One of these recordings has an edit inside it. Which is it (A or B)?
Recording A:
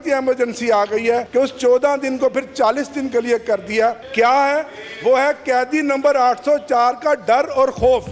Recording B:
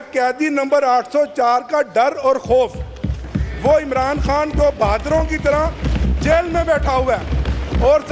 A